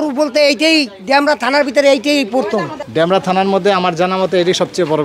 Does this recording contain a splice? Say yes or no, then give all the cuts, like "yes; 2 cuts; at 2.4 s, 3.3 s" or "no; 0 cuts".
yes; 1 cut; at 2.8 s